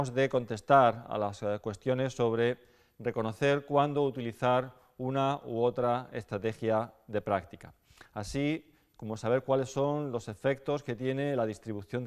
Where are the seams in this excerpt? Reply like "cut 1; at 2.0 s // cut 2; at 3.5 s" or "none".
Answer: none

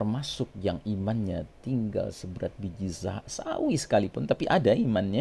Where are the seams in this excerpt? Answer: none

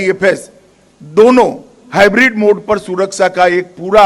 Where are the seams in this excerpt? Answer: none

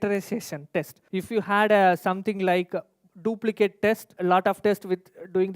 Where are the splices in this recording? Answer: cut 1; at 1.0 s // cut 2; at 4.1 s

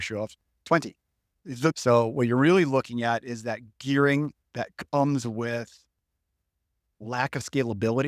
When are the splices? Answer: cut 1; at 1.7 s

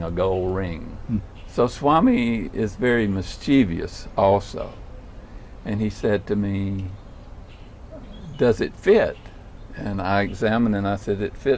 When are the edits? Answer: cut 1; at 1.2 s

